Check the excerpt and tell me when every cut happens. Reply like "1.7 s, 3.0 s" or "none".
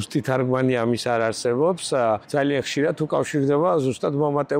2.2 s

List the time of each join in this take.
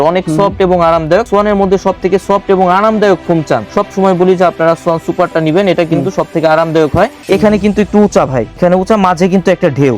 1.3 s, 3.7 s, 7.2 s, 8.6 s

